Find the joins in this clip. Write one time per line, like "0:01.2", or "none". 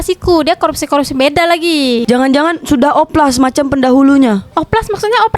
0:02.0